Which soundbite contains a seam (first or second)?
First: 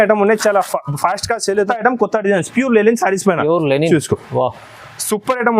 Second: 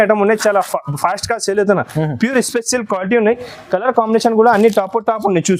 first